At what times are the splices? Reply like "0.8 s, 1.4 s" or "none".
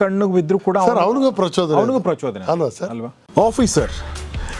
3.2 s